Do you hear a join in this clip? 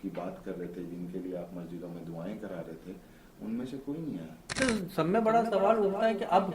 yes; 1 cut; at 4.6 s

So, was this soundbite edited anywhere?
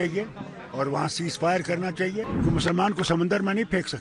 yes; 1 cut; at 2.3 s

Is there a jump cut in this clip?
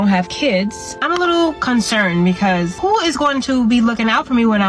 yes; 2 cuts; at 0.9 s, 2.8 s

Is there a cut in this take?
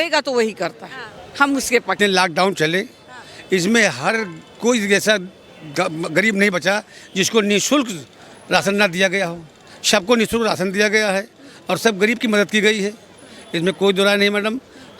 yes; 1 cut; at 2.0 s

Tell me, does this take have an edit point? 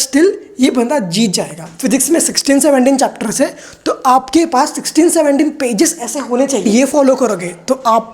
yes; 2 cuts; at 1.6 s, 6.6 s

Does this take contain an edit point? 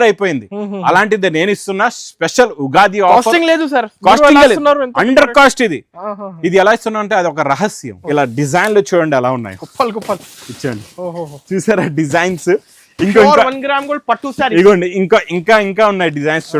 yes; 1 cut; at 7.9 s

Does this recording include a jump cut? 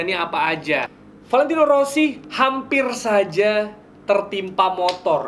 yes; 1 cut; at 1.0 s

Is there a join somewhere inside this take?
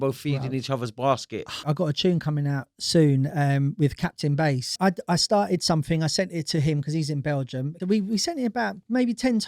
yes; 3 cuts; at 1.6 s, 4.8 s, 7.8 s

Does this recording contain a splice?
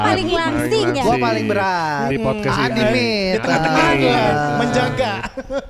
no; 0 cuts

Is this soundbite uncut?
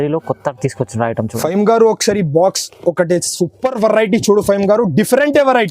no; 1 cut; at 1.3 s

